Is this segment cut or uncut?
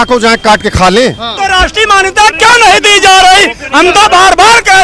cut